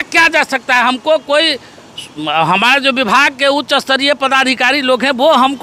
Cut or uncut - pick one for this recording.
uncut